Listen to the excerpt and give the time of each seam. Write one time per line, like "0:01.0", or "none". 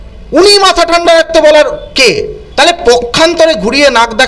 0:02.4